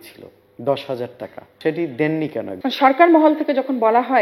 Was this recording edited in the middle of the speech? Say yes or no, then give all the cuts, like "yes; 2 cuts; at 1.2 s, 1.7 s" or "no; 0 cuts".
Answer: yes; 2 cuts; at 1.4 s, 2.5 s